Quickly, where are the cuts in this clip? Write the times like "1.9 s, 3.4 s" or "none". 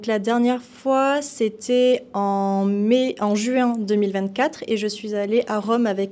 none